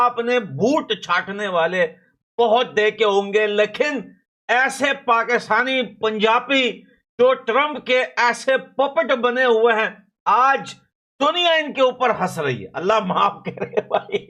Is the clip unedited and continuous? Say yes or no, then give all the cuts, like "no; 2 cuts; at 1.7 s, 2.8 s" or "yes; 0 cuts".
yes; 0 cuts